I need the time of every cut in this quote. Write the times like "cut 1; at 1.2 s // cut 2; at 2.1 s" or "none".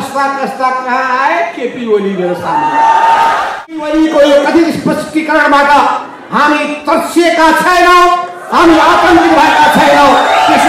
cut 1; at 3.8 s